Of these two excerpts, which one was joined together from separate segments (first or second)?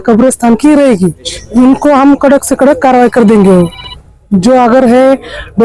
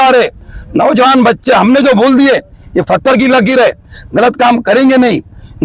first